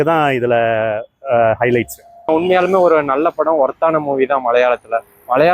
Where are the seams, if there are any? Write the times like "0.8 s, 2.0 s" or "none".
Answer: 2.3 s